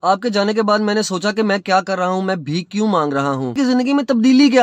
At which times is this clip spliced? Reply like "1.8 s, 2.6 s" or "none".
3.5 s